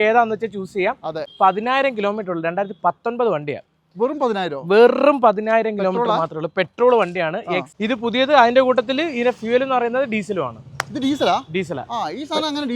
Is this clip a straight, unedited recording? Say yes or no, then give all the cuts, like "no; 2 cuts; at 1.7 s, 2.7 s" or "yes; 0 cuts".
no; 2 cuts; at 1.3 s, 7.7 s